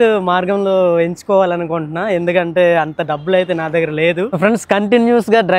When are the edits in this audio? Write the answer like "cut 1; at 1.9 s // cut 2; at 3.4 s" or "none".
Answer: cut 1; at 4.4 s